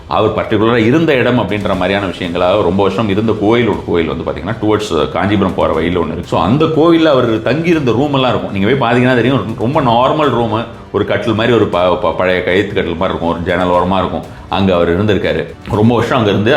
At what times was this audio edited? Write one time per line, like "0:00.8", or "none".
0:06.2
0:15.5